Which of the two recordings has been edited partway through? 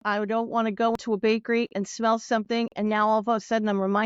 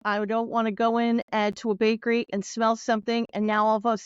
first; 1 cut; at 1.0 s

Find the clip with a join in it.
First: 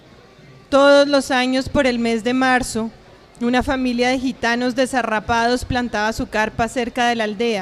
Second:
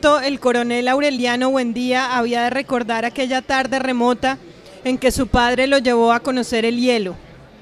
first; 1 cut; at 3.3 s

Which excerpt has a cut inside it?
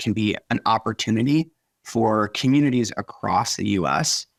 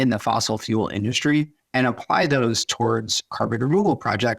second; 1 cut; at 1.6 s

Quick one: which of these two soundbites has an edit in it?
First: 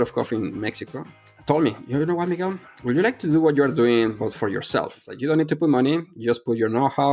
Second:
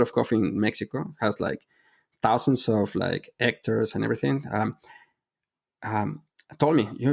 first; 2 cuts; at 1.1 s, 5.0 s

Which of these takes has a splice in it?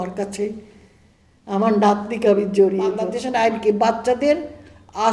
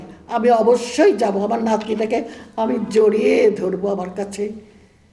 first; 1 cut; at 3.2 s

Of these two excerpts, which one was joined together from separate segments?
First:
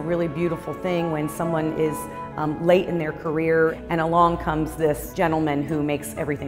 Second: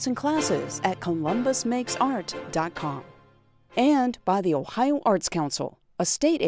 first; 2 cuts; at 3.8 s, 5.1 s

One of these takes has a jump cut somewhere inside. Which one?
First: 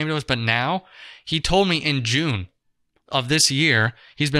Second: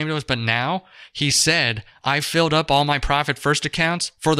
second; 1 cut; at 1.0 s

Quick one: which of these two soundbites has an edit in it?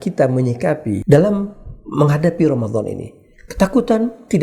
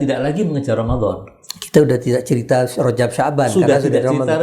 first; 1 cut; at 1.0 s

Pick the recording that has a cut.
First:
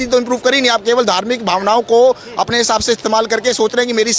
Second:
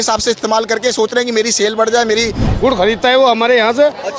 second; 1 cut; at 2.5 s

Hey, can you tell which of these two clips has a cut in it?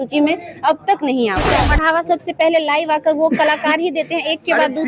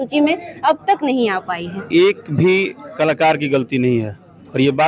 first; 1 cut; at 1.6 s

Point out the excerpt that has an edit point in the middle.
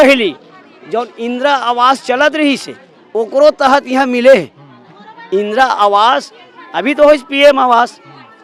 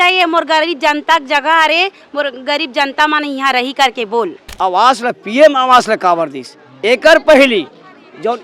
second; 1 cut; at 4.4 s

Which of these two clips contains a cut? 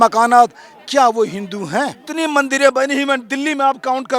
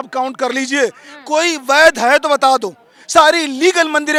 first; 1 cut; at 2.0 s

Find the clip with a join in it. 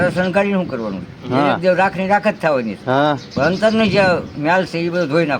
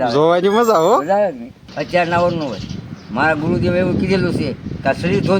second; 1 cut; at 1.7 s

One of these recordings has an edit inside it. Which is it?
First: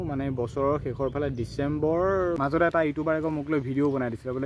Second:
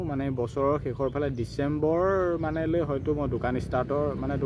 first; 1 cut; at 2.7 s

